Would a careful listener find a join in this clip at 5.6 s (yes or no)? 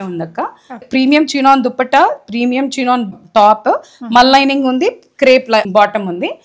yes